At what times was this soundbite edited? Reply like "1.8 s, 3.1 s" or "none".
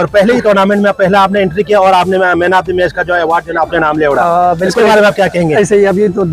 none